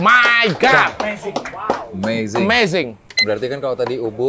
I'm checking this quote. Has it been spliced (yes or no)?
yes